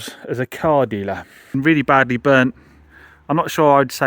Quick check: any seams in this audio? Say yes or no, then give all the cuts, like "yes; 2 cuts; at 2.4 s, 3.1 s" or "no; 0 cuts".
yes; 1 cut; at 1.6 s